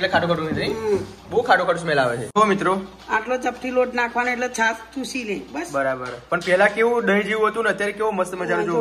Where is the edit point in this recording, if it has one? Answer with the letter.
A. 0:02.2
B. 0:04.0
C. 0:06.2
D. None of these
A